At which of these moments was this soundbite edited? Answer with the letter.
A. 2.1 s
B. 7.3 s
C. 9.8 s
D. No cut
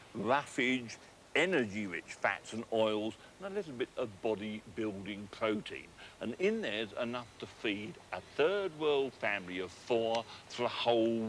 A